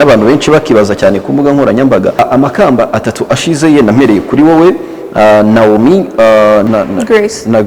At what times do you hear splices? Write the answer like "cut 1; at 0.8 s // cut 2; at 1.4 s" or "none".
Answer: cut 1; at 2.2 s // cut 2; at 6.6 s